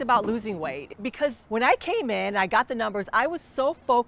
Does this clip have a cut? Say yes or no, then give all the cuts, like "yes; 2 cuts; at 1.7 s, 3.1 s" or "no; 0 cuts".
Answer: yes; 1 cut; at 1.1 s